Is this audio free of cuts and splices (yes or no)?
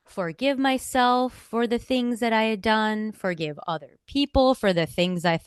yes